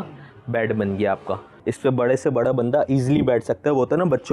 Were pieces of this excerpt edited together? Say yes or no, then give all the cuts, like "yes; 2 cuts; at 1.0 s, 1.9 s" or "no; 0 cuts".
yes; 1 cut; at 1.6 s